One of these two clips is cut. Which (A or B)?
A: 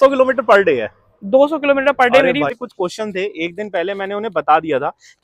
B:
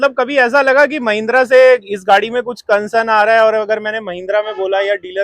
A